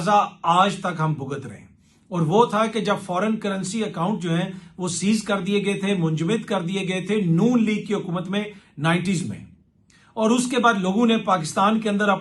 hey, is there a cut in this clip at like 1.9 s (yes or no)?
no